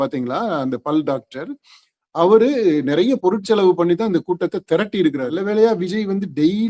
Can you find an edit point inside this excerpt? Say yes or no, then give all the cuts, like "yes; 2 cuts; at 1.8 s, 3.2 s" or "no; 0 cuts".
yes; 1 cut; at 5.3 s